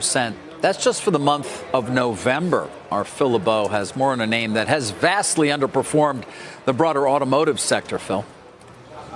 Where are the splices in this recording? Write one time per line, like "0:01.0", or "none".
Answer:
none

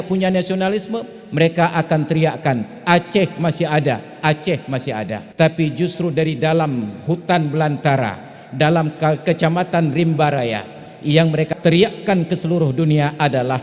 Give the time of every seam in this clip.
0:05.2
0:11.5

